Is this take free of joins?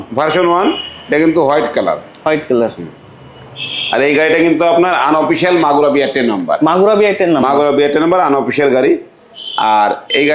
yes; 0 cuts

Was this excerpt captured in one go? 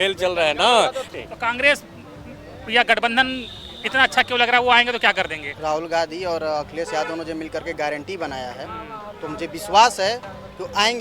no; 2 cuts; at 1.1 s, 5.4 s

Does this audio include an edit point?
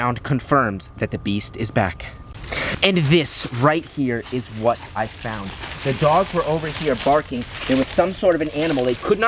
no; 0 cuts

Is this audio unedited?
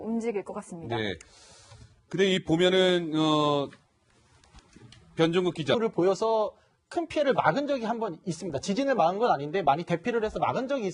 yes; 0 cuts

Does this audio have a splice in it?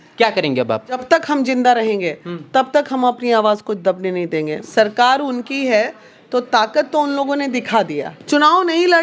yes; 3 cuts; at 1.0 s, 4.6 s, 8.1 s

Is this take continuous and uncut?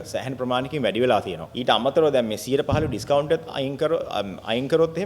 no; 1 cut; at 1.4 s

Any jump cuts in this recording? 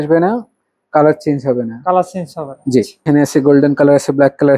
yes; 1 cut; at 3.0 s

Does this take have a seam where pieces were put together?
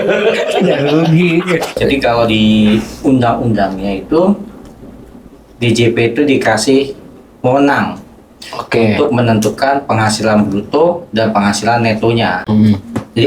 yes; 1 cut; at 1.7 s

